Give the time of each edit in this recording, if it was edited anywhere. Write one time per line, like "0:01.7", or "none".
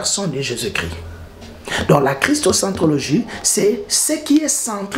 none